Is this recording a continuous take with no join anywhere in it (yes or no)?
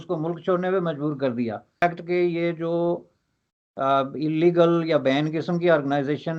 no